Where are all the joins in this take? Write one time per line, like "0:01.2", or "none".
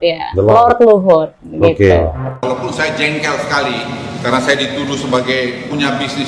0:02.2